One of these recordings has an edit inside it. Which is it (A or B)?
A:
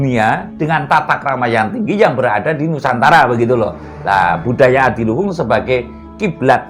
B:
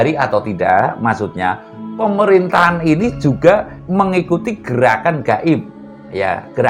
B